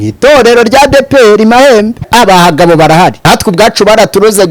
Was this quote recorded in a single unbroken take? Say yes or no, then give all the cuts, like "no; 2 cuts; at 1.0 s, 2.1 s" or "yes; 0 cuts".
no; 2 cuts; at 2.1 s, 3.2 s